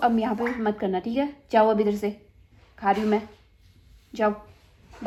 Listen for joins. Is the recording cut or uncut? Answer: uncut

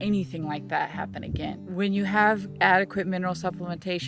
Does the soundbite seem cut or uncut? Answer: cut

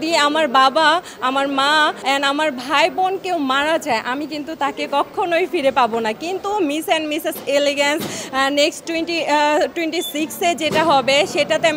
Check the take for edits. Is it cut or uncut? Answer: uncut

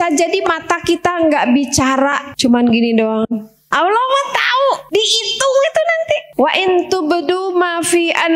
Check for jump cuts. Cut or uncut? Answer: cut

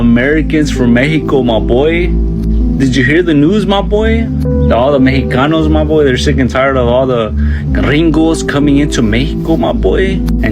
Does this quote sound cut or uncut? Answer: uncut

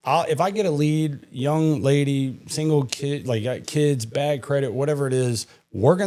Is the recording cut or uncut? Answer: uncut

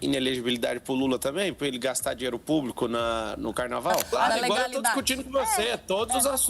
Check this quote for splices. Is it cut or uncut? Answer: cut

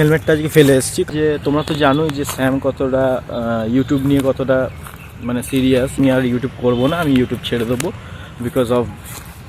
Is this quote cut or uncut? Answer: cut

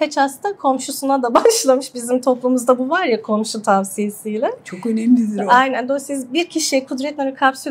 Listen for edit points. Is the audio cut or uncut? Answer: uncut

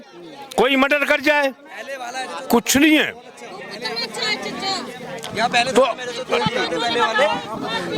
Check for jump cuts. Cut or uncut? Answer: uncut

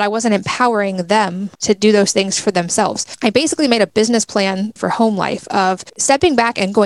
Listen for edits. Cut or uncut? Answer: cut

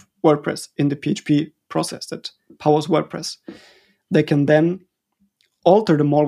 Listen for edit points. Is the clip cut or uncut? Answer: uncut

